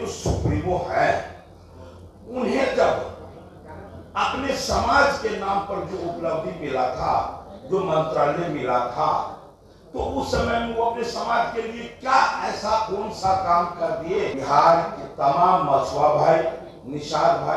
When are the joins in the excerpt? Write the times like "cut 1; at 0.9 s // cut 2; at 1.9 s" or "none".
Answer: cut 1; at 14.4 s